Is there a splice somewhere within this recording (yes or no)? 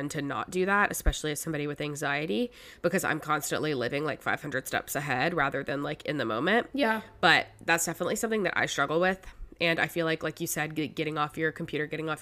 no